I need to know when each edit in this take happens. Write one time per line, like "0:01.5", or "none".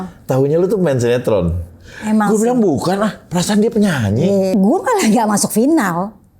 0:04.5